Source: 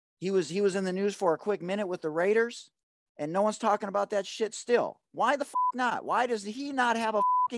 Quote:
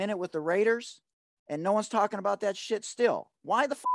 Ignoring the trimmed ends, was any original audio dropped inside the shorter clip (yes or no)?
no